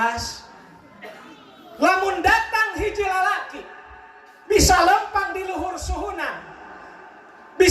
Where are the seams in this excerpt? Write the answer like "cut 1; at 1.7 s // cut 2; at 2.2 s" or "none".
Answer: cut 1; at 1.2 s